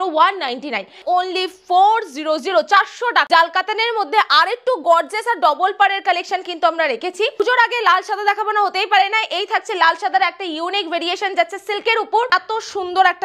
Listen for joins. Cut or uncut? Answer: cut